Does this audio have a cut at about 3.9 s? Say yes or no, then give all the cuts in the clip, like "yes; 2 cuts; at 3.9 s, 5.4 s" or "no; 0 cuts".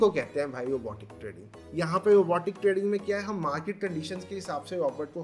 no; 1 cut; at 1.6 s